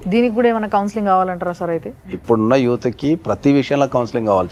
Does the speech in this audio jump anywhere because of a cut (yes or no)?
no